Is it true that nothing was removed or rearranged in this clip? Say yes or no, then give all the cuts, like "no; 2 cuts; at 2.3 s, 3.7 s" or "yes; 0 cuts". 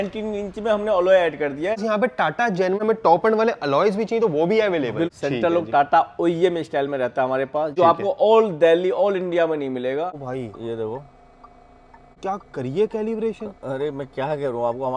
no; 6 cuts; at 1.8 s, 2.8 s, 5.1 s, 7.7 s, 10.2 s, 12.2 s